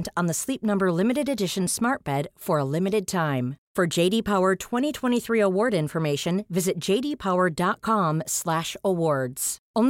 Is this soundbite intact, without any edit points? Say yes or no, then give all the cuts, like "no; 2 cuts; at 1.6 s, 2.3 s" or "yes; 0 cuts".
yes; 0 cuts